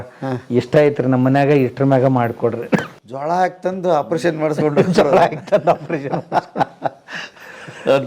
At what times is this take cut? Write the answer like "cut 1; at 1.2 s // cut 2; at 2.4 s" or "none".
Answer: none